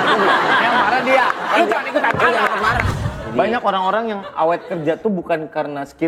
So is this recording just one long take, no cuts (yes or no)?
no